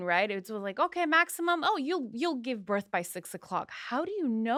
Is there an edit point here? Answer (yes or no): no